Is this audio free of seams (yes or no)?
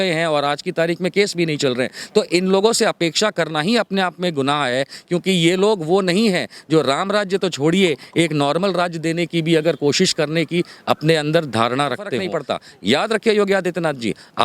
no